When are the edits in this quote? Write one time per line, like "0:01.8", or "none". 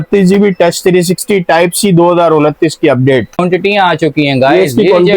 0:03.4